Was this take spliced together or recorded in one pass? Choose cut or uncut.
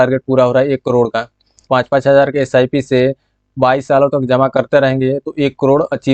cut